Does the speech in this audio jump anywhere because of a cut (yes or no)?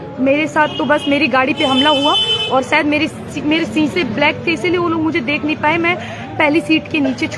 no